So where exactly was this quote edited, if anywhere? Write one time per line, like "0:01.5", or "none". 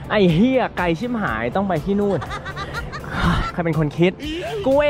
none